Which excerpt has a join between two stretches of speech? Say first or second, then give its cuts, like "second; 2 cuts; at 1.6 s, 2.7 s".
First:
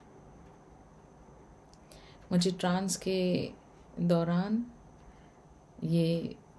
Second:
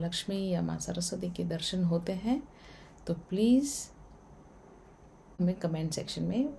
second; 1 cut; at 5.4 s